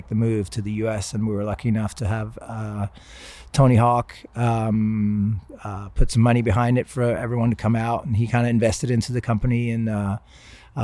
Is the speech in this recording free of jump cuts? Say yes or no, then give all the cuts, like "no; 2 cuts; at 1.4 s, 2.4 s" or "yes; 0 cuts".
yes; 0 cuts